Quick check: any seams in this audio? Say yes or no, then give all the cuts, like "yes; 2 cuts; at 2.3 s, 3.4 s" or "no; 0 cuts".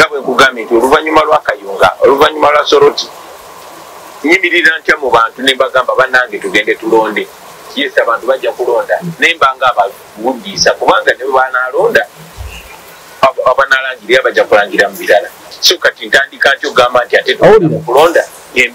no; 0 cuts